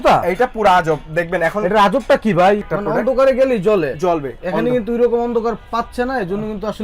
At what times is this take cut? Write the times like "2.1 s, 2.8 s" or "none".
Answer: 2.7 s